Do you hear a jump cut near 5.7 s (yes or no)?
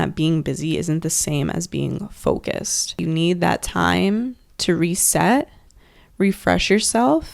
no